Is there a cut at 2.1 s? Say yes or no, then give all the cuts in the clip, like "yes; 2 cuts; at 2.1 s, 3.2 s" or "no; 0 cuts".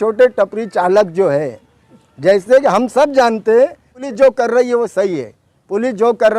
no; 1 cut; at 4.0 s